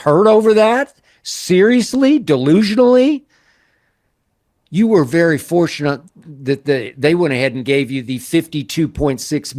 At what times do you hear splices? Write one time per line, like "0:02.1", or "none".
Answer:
none